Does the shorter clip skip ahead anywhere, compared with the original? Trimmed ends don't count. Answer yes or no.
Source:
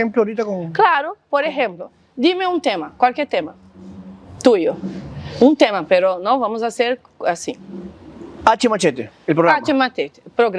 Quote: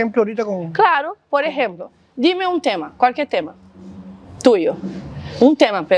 no